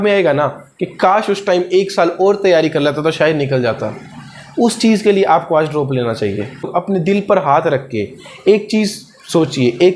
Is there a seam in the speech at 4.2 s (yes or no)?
no